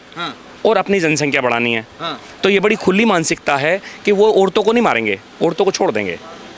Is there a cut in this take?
no; 0 cuts

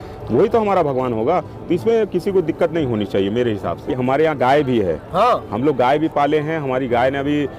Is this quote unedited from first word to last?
no; 1 cut; at 3.8 s

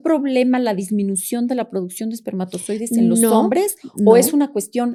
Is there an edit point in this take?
no; 0 cuts

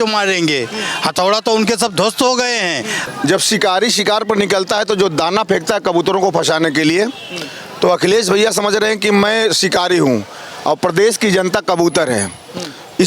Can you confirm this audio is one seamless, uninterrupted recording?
no; 1 cut; at 3.0 s

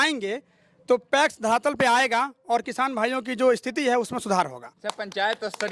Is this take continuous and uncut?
yes; 0 cuts

